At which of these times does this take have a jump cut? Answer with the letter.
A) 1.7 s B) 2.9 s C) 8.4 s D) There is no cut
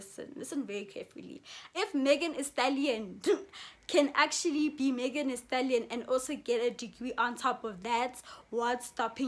A